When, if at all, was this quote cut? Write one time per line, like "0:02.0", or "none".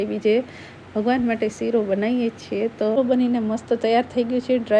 0:03.0